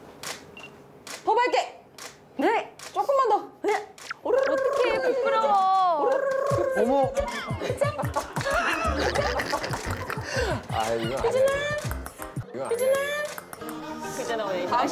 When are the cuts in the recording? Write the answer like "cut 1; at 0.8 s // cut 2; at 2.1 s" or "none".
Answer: cut 1; at 12.4 s